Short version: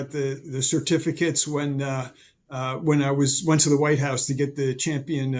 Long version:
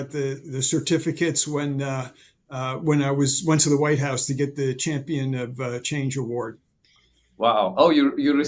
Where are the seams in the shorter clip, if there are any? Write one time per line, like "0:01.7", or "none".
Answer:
none

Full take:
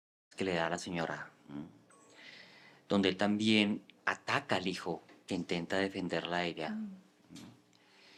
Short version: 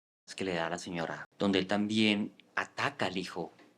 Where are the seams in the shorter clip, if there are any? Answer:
0:01.2

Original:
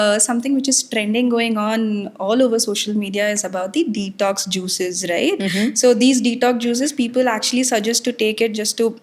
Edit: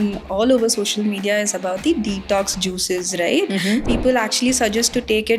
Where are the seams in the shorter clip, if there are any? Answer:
0:03.8

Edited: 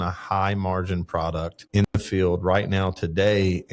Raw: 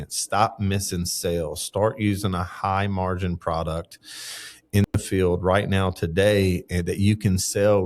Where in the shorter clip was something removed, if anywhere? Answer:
0:01.6

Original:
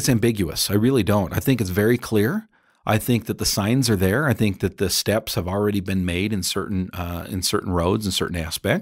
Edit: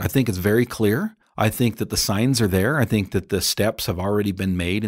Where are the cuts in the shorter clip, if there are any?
0:01.2

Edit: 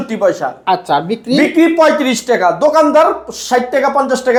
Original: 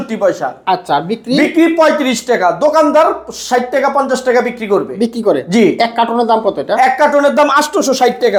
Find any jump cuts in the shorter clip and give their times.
none

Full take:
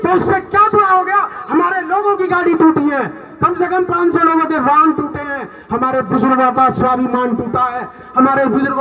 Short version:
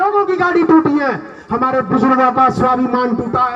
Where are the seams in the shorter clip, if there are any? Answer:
0:01.3

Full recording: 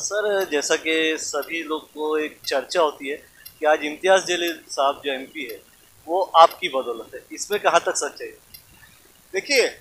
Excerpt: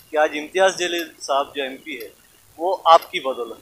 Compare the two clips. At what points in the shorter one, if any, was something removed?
none

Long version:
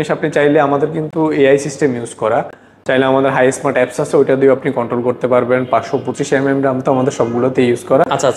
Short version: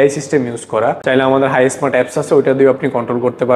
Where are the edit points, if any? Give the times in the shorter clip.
0:01.0

